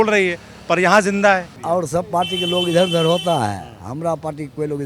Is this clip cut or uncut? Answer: cut